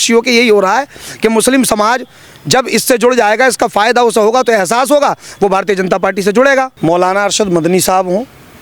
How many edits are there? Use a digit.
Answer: 1